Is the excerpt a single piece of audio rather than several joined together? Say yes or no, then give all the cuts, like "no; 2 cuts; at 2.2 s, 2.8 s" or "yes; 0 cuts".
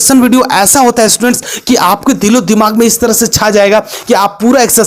yes; 0 cuts